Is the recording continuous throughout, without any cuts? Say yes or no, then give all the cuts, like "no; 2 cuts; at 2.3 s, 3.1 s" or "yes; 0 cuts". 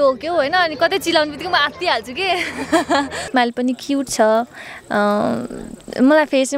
no; 1 cut; at 3.3 s